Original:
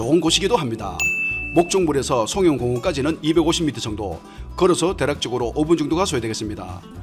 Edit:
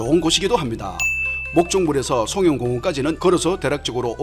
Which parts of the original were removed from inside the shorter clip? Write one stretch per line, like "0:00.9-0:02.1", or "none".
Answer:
0:03.2-0:04.5

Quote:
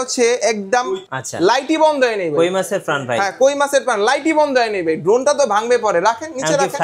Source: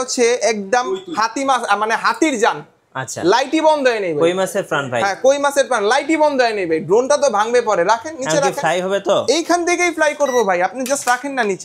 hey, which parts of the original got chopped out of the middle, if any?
0:01.0-0:02.9

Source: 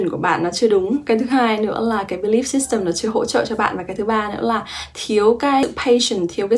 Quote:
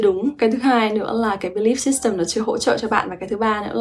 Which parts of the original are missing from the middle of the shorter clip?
none

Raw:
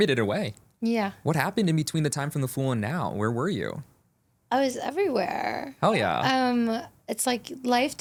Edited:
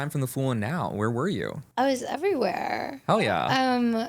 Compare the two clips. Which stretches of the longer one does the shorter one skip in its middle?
0:03.8-0:04.3

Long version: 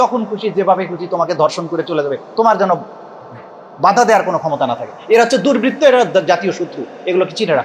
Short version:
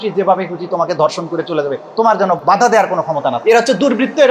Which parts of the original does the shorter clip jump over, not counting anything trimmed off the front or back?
0:02.8-0:03.8
0:04.7-0:05.0

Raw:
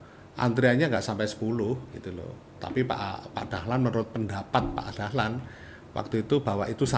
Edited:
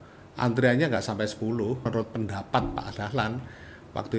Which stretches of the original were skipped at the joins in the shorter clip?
0:01.9-0:03.9

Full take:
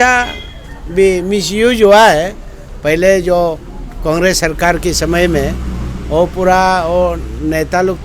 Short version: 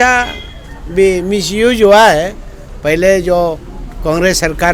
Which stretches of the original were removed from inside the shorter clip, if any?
none

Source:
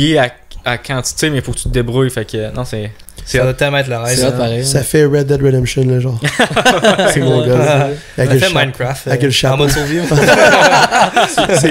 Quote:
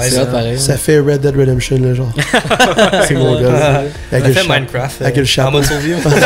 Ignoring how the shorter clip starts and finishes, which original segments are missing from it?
none

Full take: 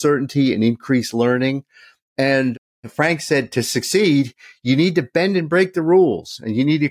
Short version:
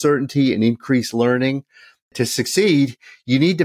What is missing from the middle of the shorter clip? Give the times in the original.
0:02.1-0:03.5

